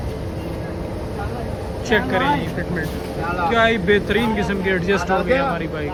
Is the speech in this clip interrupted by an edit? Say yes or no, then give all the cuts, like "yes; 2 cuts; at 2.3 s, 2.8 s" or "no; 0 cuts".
no; 0 cuts